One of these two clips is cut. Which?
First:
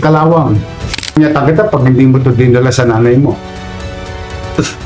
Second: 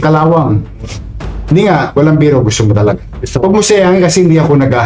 first; 1 cut; at 1.2 s

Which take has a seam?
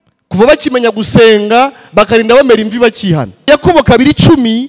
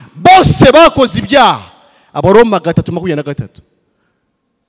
first; 1 cut; at 3.5 s

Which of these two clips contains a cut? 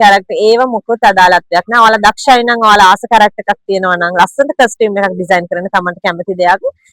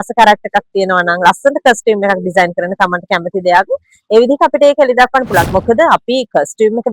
second; 1 cut; at 5.5 s

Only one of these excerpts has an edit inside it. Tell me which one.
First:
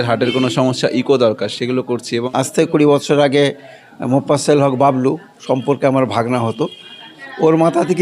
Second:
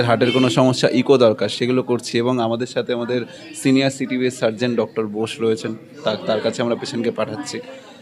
first; 1 cut; at 2.1 s

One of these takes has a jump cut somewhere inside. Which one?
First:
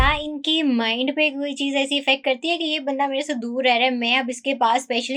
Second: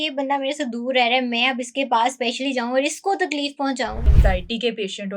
second; 1 cut; at 4.0 s

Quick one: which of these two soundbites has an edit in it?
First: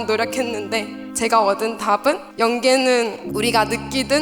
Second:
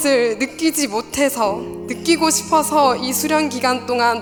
first; 3 cuts; at 1.0 s, 2.3 s, 3.2 s

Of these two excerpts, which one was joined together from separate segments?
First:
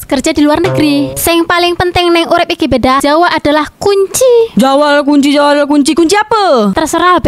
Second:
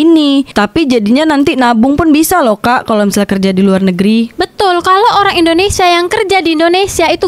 first; 3 cuts; at 1.1 s, 3.0 s, 4.5 s

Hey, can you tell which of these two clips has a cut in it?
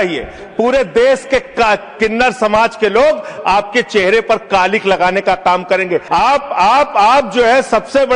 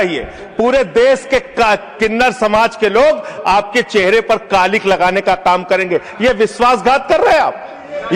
first; 1 cut; at 6.0 s

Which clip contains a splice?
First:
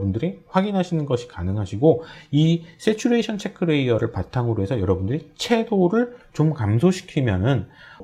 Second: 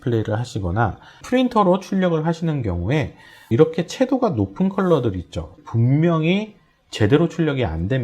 second; 3 cuts; at 1.2 s, 3.5 s, 5.5 s

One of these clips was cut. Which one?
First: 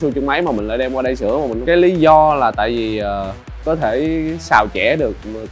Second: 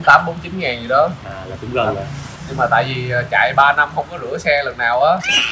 first; 2 cuts; at 1.6 s, 3.6 s

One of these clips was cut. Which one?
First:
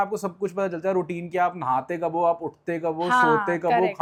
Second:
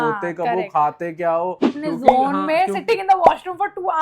second; 1 cut; at 1.7 s

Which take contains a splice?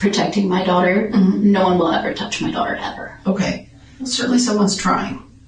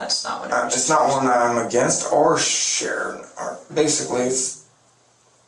first; 1 cut; at 4.0 s

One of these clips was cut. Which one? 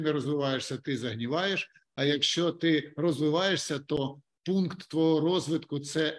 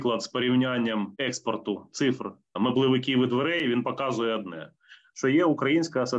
second; 2 cuts; at 1.1 s, 2.6 s

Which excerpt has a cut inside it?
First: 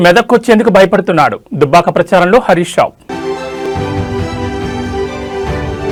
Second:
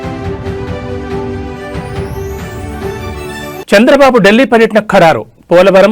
second; 1 cut; at 3.0 s

